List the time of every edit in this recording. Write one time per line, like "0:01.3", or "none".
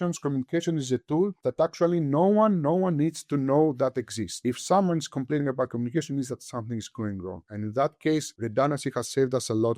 none